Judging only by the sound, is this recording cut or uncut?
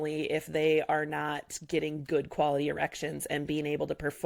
uncut